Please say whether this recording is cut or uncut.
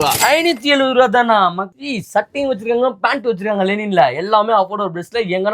cut